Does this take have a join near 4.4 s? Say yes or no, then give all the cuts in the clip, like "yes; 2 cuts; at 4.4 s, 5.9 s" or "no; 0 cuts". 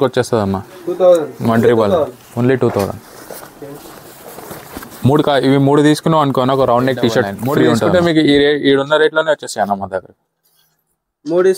no; 1 cut; at 7.9 s